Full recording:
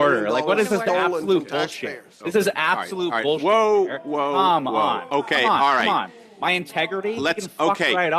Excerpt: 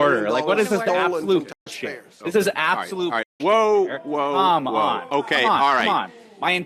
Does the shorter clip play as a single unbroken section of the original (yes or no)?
yes